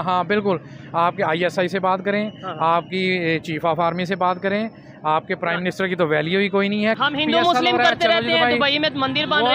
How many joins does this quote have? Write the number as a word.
one